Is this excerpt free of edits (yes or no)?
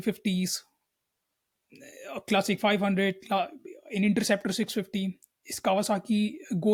yes